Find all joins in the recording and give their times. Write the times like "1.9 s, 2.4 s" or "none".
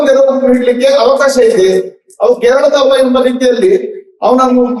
none